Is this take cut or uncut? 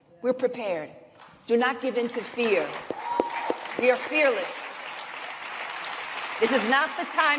uncut